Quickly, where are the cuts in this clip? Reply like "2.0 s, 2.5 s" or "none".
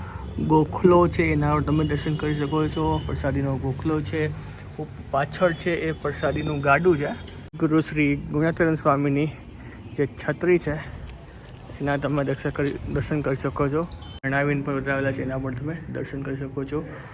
7.5 s, 14.2 s